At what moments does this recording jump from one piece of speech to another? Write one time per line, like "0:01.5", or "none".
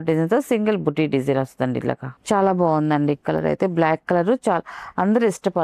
none

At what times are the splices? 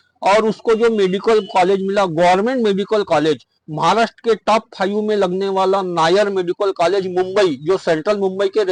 none

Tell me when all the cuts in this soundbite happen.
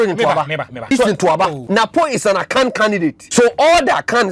0:00.9
0:01.6
0:03.2

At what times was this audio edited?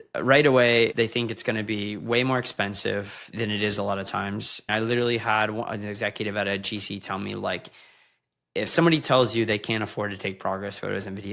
0:00.9
0:03.3
0:04.7

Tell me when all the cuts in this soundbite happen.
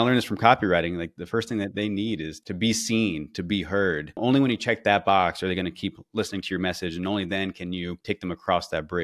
0:01.1
0:02.3
0:04.2
0:08.0

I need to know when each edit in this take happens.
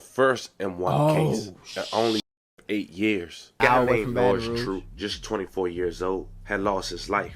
0:03.6

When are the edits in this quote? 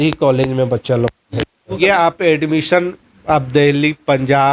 0:01.6

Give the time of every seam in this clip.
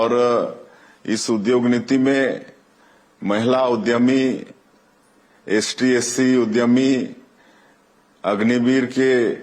0:02.1

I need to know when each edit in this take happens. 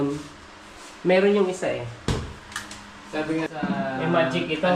0:02.1
0:03.5

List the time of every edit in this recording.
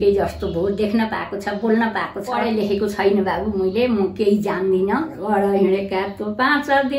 0:02.4
0:05.1

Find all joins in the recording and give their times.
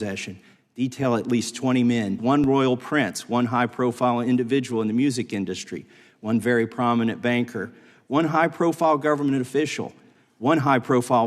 0:02.1

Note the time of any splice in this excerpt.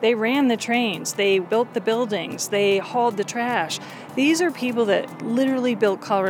0:01.4
0:05.2

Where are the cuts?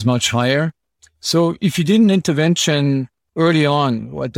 0:03.2

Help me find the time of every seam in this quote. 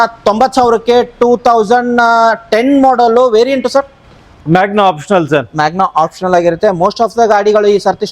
none

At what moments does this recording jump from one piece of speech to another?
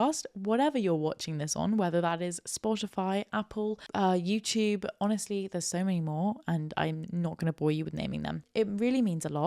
0:08.4

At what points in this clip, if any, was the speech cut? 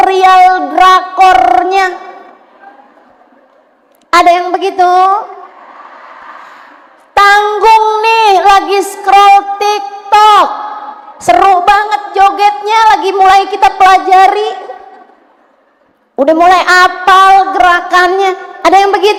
none

